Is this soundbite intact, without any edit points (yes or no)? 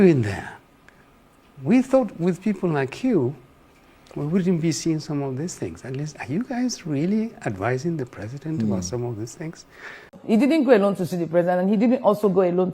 no